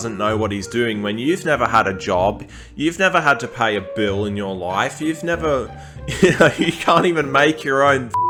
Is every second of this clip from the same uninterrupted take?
yes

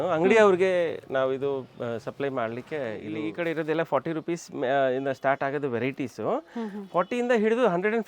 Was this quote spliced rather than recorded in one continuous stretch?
yes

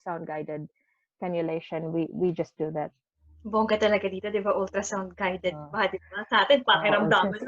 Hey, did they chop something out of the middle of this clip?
yes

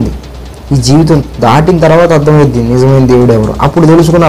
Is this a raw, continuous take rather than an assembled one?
yes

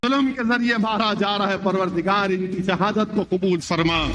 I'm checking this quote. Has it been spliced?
yes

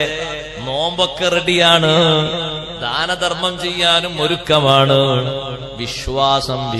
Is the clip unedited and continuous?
yes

